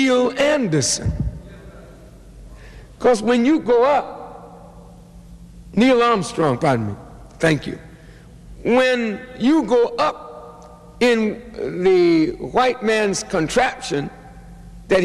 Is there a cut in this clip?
no; 0 cuts

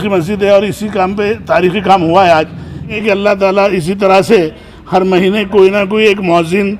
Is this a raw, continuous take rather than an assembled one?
no; 1 cut; at 2.9 s

